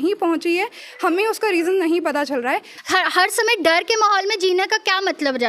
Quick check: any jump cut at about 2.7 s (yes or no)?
yes